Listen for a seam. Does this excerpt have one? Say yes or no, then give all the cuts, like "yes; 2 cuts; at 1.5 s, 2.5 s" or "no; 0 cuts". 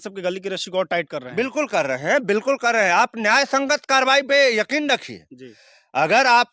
no; 0 cuts